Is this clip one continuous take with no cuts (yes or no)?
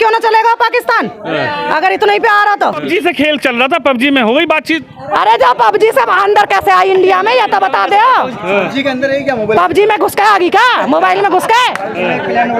no